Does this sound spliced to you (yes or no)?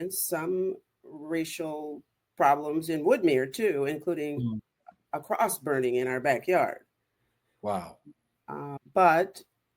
yes